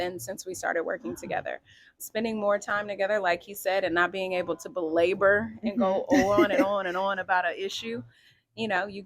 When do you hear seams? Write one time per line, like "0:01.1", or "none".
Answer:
0:02.0